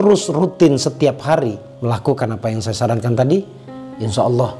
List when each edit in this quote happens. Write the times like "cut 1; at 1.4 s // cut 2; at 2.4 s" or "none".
cut 1; at 1.7 s